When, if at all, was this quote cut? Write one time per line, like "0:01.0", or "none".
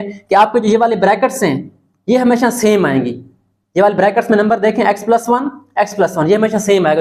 none